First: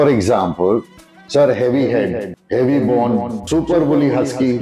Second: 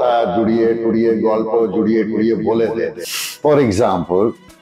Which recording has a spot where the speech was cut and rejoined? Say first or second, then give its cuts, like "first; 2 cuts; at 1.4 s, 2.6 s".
first; 2 cuts; at 2.3 s, 3.4 s